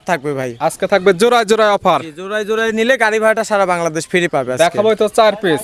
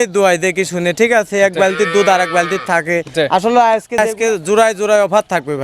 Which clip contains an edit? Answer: second; 1 cut; at 4.0 s

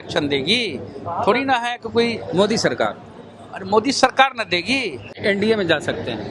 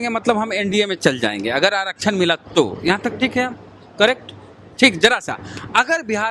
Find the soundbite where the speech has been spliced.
first; 1 cut; at 5.2 s

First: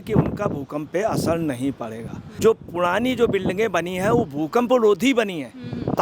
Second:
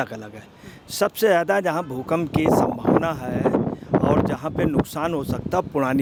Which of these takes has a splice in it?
first; 1 cut; at 2.2 s

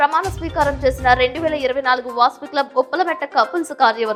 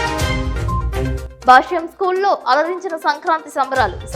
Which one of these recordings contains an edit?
second; 1 cut; at 1.2 s

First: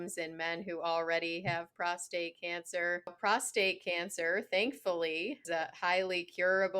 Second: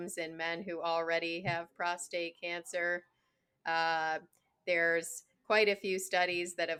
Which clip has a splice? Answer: first; 2 cuts; at 3.2 s, 5.4 s

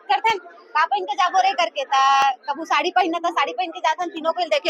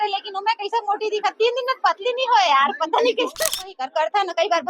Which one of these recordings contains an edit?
second; 1 cut; at 3.3 s

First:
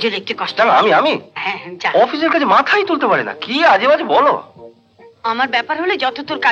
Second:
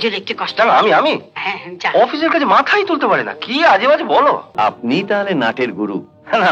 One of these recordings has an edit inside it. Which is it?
second; 1 cut; at 4.5 s

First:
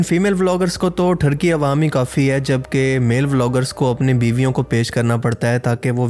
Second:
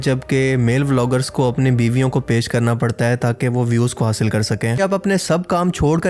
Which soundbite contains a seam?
second; 1 cut; at 4.8 s

